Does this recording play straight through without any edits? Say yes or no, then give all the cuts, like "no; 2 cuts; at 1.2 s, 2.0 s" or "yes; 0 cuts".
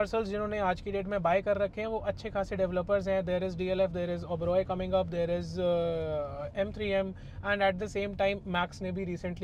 yes; 0 cuts